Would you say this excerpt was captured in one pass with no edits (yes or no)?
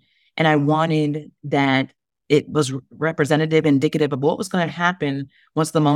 yes